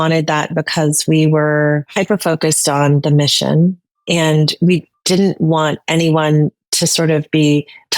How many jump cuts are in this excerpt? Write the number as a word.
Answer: one